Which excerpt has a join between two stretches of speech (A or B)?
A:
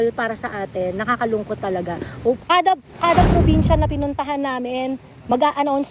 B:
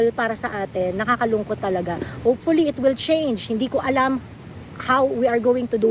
A